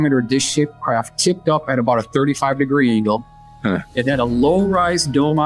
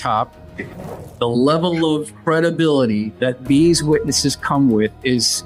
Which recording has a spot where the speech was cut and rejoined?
second; 3 cuts; at 0.9 s, 2.1 s, 3.1 s

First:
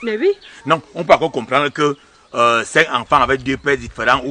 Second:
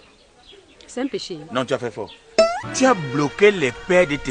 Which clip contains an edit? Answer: second; 1 cut; at 2.6 s

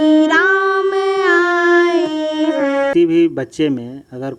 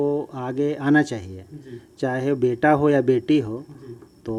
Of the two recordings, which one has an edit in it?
first; 1 cut; at 2.9 s

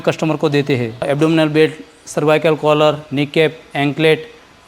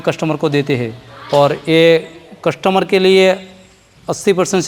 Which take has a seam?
first; 1 cut; at 1.0 s

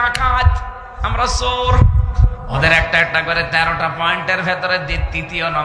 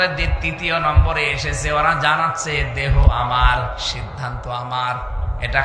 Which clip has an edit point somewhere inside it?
first; 1 cut; at 2.3 s

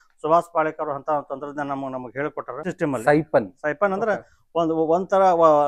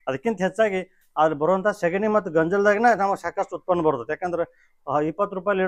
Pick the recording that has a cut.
first; 1 cut; at 2.7 s

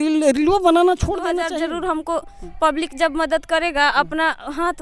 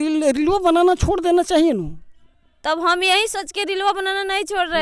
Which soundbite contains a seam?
first; 1 cut; at 1.4 s

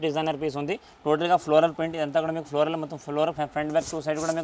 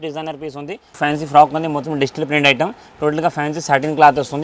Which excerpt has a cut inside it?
second; 1 cut; at 0.9 s

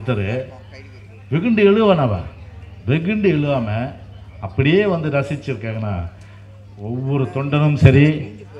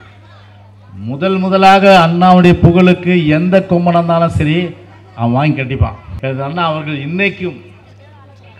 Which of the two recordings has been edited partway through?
second; 1 cut; at 6.1 s

